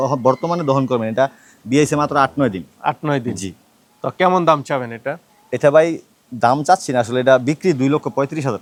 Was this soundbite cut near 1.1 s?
no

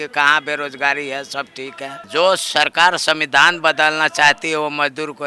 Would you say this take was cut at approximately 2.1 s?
yes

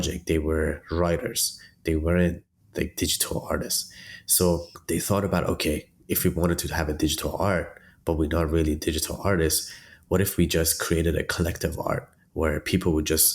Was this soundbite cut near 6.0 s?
no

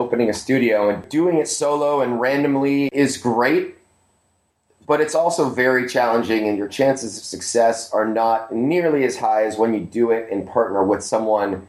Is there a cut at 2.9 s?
yes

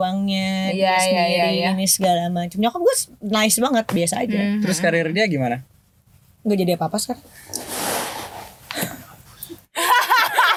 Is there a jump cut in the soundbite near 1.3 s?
no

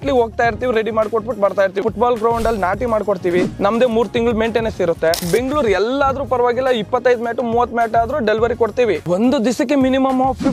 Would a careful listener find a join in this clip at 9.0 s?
yes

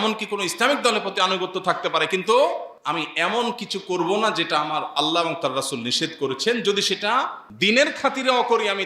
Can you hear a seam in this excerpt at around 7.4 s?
yes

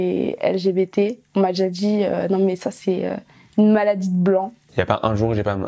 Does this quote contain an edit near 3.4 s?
no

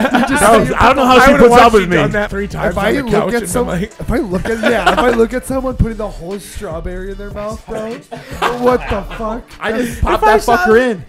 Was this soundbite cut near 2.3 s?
yes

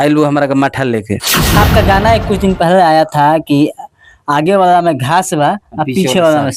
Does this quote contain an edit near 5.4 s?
no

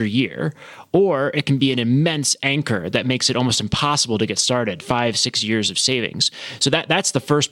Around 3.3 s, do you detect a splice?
no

